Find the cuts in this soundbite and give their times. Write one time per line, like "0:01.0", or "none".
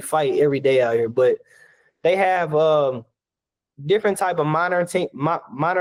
none